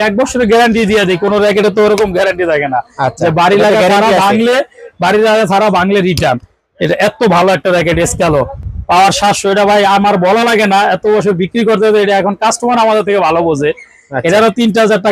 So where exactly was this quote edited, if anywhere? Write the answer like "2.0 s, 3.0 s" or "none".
none